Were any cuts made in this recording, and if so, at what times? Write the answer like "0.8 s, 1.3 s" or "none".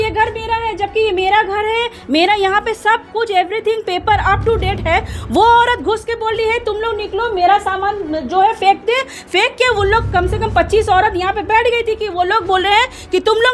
none